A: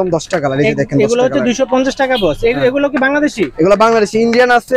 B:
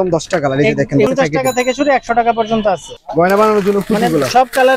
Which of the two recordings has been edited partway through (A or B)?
B